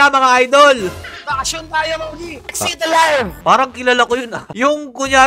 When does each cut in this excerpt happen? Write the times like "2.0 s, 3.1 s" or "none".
1.1 s, 3.4 s